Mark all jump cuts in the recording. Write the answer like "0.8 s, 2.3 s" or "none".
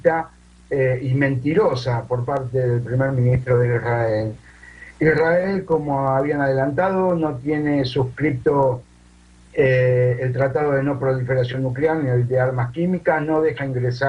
11.5 s